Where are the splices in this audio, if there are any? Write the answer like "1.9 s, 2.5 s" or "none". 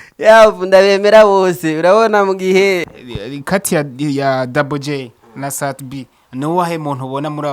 2.9 s

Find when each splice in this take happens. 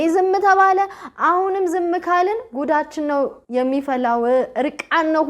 3.4 s

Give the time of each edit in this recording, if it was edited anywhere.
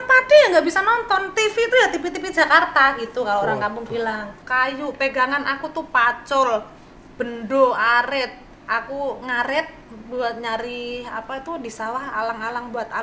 4.4 s

